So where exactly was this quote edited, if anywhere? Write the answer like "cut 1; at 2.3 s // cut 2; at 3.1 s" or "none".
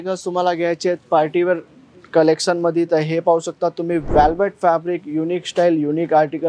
none